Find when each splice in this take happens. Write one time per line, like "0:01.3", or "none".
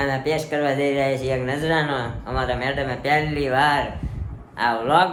none